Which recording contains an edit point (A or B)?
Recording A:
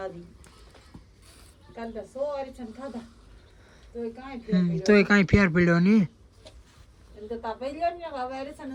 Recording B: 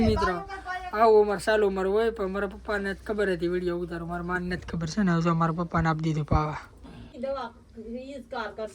B